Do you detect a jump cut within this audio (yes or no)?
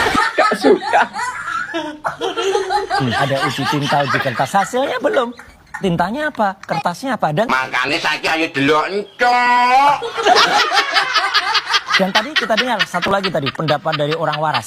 no